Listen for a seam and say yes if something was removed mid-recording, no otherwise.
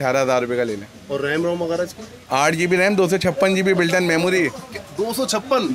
no